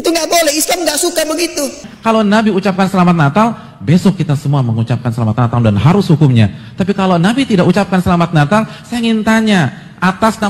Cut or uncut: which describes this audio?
cut